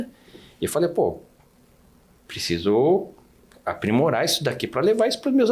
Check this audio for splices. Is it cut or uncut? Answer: uncut